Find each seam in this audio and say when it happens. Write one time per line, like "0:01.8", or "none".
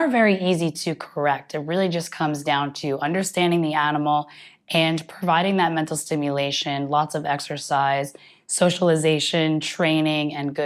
none